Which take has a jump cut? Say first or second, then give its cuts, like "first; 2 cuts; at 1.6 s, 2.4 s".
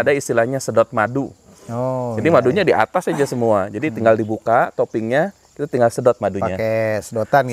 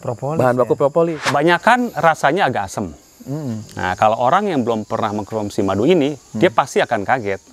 second; 1 cut; at 1.3 s